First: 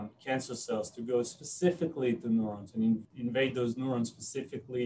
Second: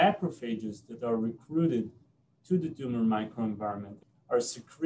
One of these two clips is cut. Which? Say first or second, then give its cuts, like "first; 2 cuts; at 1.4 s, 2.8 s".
first; 1 cut; at 3.0 s